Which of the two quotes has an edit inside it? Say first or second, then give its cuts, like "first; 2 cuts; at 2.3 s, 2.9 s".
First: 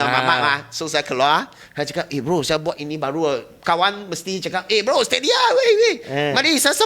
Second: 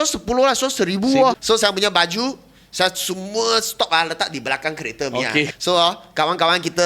second; 2 cuts; at 1.4 s, 5.5 s